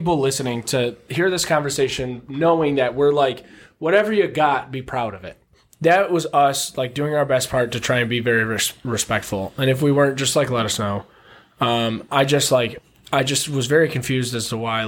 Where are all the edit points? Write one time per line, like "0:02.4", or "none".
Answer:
0:05.3